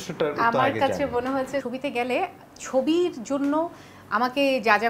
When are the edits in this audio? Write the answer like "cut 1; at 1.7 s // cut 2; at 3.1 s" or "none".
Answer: cut 1; at 1.6 s